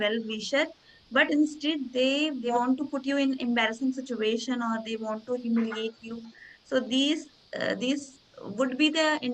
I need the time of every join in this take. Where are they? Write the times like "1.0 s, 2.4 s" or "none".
2.5 s